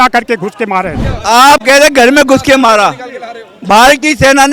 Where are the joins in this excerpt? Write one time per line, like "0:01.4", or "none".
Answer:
0:01.0